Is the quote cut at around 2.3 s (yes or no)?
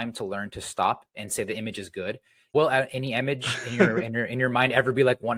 no